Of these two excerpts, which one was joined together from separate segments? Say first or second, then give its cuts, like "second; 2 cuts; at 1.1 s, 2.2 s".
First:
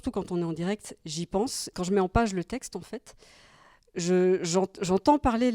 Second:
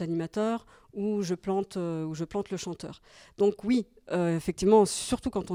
first; 1 cut; at 1.7 s